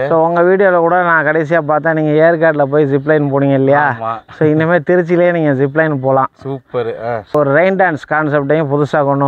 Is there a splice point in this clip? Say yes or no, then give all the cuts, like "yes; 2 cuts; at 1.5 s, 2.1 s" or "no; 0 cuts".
no; 0 cuts